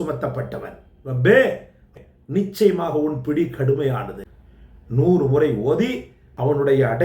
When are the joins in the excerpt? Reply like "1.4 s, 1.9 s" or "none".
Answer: 2.0 s, 4.1 s, 6.1 s

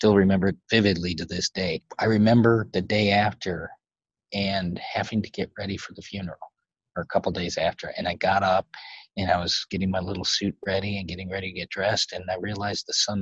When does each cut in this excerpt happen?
1.8 s

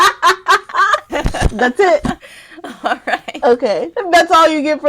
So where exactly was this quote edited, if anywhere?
1.1 s

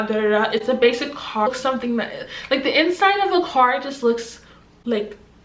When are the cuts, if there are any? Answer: 1.5 s

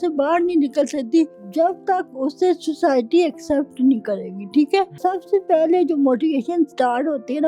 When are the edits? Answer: 1.4 s, 4.9 s

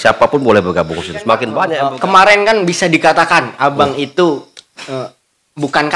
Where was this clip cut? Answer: 1.6 s

